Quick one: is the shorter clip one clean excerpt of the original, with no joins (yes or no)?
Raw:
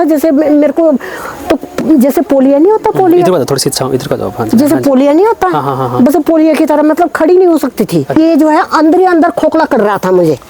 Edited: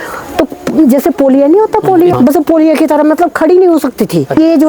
no